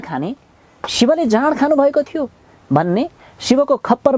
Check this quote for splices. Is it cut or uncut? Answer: uncut